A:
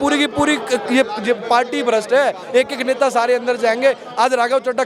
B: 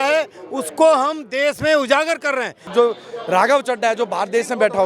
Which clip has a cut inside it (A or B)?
B